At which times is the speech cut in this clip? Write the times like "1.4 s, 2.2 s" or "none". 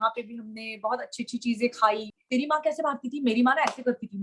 2.1 s

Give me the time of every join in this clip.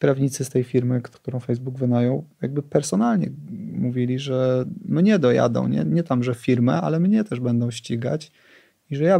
1.1 s

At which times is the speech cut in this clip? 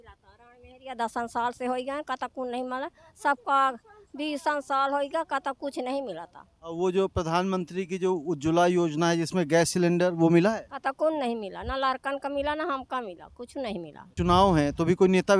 14.1 s

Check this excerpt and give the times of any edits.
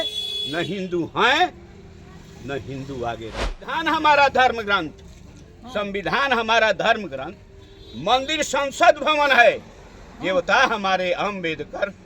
3.8 s

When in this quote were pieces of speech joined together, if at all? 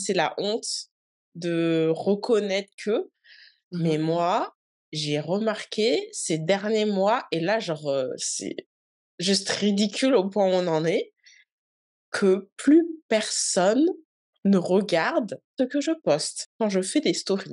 15.5 s, 16.4 s

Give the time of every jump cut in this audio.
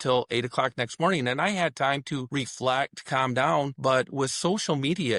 2.3 s, 3.7 s

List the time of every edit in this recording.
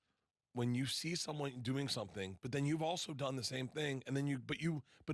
none

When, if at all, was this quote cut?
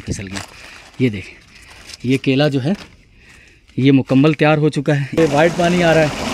5.2 s

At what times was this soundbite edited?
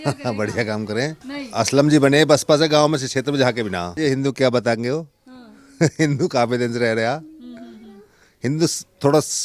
1.2 s, 3.9 s

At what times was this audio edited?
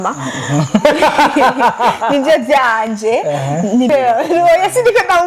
3.9 s

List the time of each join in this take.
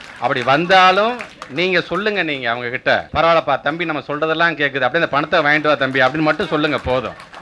3.1 s

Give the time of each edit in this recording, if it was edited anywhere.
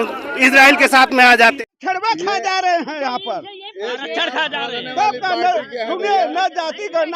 1.6 s

